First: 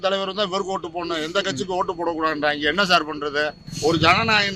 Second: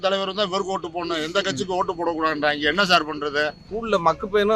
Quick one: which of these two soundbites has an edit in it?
second; 1 cut; at 3.7 s

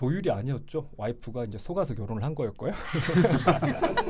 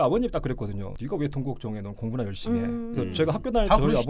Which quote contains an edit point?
second; 1 cut; at 0.9 s

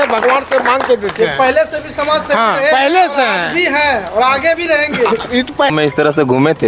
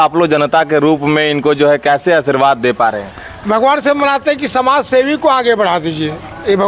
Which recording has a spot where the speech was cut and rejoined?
first; 1 cut; at 5.7 s

